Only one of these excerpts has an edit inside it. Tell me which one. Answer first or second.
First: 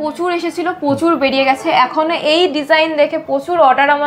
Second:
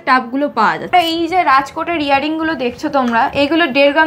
second